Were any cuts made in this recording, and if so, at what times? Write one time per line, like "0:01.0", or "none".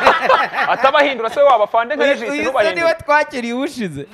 none